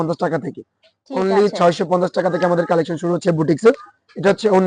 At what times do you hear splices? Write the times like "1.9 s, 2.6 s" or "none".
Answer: none